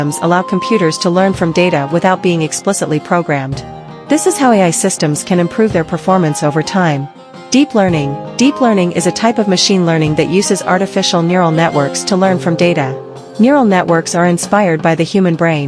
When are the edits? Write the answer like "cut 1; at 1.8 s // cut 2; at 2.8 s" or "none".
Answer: none